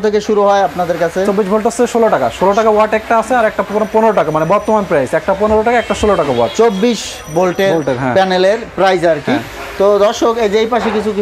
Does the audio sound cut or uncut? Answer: uncut